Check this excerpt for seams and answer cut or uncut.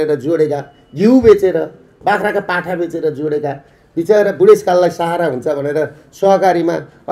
uncut